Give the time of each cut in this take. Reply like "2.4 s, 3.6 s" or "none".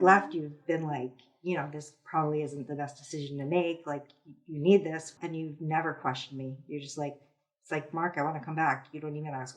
5.1 s